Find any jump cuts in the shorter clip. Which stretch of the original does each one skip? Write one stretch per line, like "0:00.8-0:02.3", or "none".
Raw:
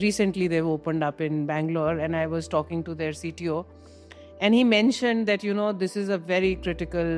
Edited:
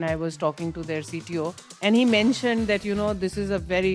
0:03.8-0:04.2